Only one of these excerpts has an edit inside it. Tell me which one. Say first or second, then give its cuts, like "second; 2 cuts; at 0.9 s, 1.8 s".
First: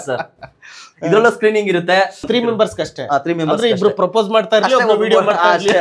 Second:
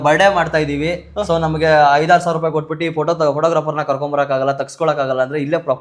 first; 1 cut; at 2.3 s